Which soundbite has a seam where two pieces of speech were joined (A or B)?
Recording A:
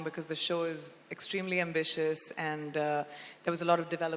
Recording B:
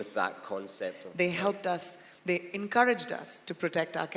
B